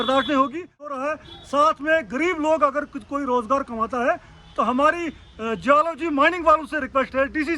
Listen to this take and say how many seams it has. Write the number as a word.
one